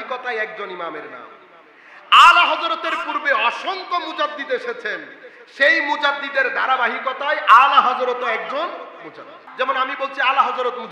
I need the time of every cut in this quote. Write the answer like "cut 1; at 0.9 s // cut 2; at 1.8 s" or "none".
cut 1; at 9.4 s